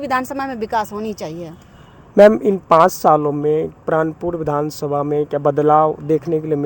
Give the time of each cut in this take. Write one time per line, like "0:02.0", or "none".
none